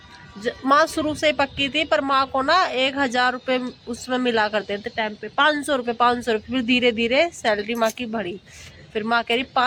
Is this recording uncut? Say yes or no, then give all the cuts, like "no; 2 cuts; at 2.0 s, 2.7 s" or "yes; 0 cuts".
yes; 0 cuts